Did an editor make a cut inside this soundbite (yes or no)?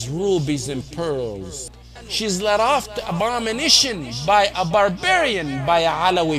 yes